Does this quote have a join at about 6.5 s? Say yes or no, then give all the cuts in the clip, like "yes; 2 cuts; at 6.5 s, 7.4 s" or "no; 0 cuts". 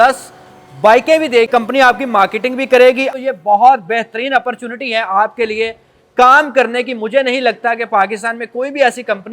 no; 2 cuts; at 1.5 s, 3.1 s